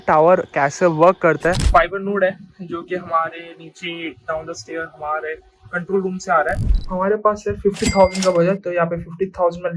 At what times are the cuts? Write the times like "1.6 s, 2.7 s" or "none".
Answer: 1.6 s, 6.8 s

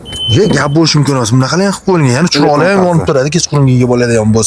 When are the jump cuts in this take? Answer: none

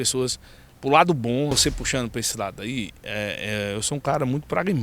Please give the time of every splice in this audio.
1.5 s

